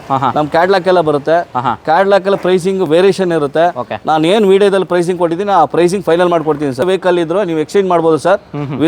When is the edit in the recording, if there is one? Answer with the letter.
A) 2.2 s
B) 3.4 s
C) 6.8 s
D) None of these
C